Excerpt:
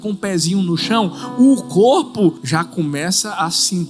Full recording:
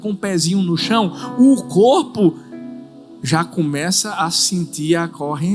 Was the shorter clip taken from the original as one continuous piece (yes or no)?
no